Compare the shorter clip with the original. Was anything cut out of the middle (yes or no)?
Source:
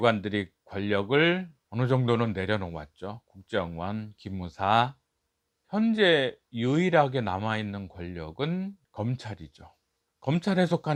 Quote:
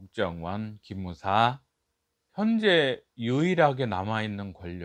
no